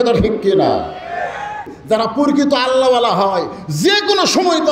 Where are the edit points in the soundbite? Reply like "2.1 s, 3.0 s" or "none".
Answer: 1.7 s